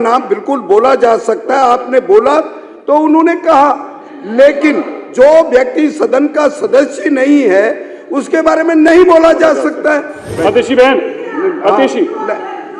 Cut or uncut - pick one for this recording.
cut